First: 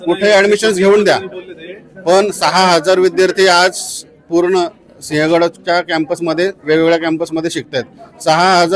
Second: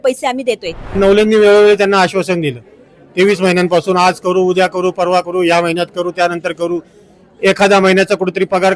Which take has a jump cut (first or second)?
second